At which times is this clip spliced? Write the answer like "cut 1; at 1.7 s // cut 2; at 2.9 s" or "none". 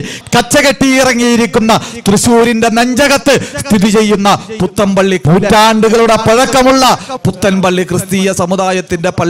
cut 1; at 5.2 s